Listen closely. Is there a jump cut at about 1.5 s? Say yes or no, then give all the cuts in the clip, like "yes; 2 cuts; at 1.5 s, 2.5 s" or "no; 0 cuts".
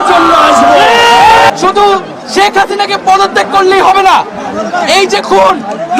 yes; 1 cut; at 1.5 s